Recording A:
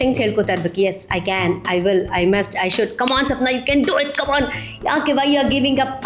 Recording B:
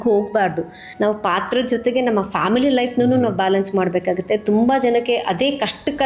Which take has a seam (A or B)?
B